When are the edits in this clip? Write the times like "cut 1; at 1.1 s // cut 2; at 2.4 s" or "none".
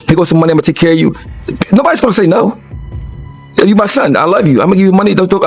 none